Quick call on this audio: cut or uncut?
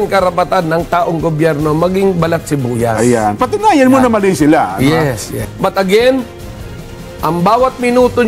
cut